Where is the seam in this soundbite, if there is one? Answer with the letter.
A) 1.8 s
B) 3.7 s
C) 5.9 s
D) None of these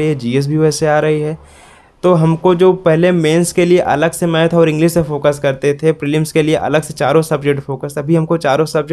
D